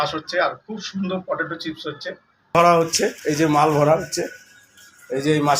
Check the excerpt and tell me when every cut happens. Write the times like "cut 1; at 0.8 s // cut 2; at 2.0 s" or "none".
cut 1; at 2.5 s

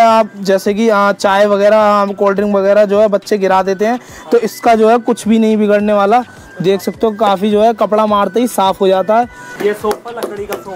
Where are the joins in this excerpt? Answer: cut 1; at 9.4 s

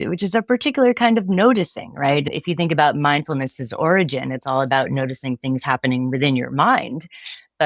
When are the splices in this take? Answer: cut 1; at 2.2 s

